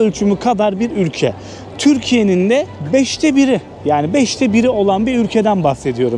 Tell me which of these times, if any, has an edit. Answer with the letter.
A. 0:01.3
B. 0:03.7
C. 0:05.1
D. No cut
D